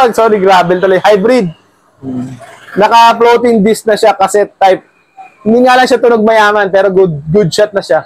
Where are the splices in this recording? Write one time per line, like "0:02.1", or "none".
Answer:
none